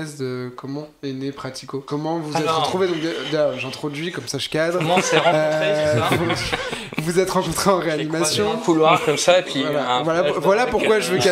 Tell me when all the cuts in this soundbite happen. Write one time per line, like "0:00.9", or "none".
0:01.9